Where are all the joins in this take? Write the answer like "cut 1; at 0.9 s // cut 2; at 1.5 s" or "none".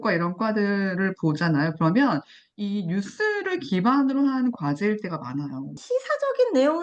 cut 1; at 5.8 s